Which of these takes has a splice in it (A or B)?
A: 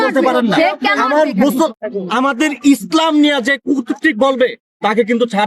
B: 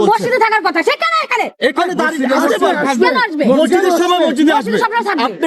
A